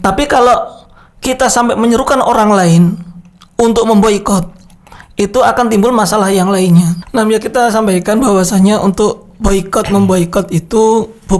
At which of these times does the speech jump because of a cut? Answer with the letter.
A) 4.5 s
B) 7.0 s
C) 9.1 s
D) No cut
B